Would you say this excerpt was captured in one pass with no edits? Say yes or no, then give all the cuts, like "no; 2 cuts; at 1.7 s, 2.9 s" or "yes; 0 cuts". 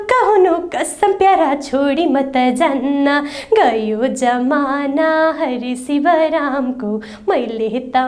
yes; 0 cuts